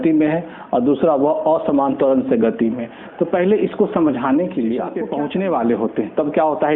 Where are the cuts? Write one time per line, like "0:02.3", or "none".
0:05.0